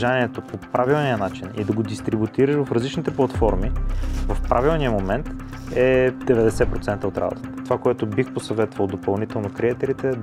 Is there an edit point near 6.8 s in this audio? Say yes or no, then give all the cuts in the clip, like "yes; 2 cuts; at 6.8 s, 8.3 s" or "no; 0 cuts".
no; 0 cuts